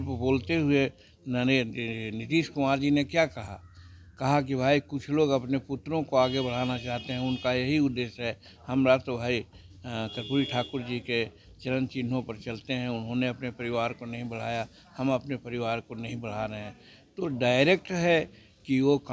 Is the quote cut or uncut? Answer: uncut